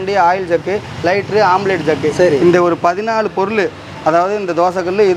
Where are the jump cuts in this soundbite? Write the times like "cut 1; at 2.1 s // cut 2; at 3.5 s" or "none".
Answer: none